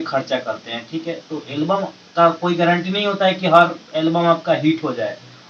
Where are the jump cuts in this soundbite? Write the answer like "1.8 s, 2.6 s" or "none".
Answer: none